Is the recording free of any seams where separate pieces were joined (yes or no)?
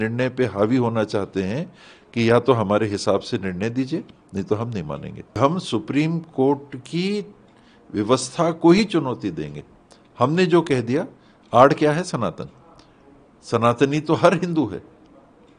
no